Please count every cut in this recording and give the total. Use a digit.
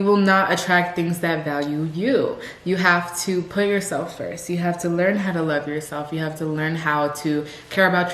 0